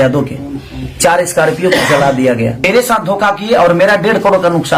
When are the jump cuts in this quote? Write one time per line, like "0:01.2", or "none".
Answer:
0:02.6